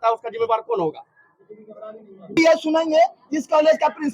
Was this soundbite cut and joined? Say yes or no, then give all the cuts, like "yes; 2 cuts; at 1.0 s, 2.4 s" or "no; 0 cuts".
yes; 1 cut; at 2.3 s